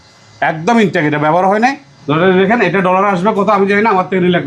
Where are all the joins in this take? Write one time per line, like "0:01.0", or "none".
0:01.9